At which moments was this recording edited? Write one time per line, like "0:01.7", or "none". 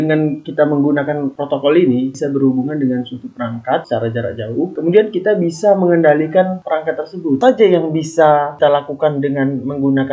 0:02.1
0:03.8
0:07.4